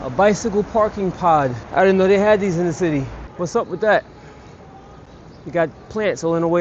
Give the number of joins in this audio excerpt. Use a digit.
2